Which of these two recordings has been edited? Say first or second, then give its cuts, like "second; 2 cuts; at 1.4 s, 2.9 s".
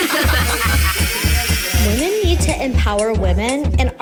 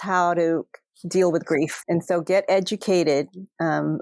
second; 1 cut; at 1.8 s